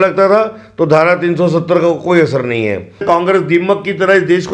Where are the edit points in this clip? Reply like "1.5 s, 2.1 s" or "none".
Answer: 3.0 s